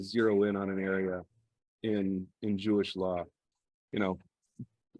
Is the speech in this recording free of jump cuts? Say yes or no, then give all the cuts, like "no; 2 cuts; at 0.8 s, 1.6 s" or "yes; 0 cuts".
no; 1 cut; at 3.5 s